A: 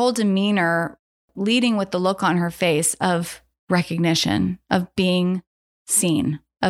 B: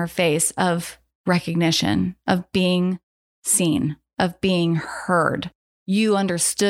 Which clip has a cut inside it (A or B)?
A